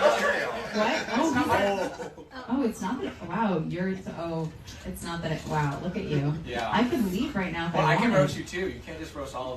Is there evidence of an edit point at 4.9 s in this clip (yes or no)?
no